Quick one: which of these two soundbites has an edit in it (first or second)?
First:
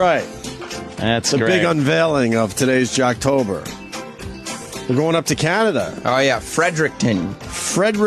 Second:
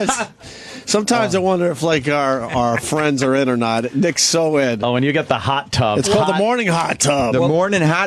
second